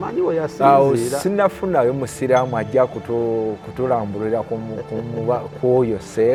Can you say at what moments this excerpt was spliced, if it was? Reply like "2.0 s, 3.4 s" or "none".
none

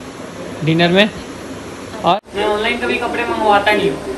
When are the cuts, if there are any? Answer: 2.1 s

